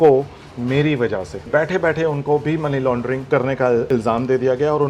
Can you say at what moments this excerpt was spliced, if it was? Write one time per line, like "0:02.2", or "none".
0:01.4
0:03.2
0:03.9